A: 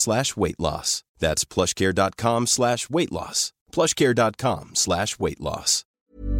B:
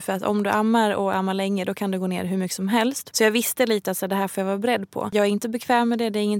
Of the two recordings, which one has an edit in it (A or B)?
B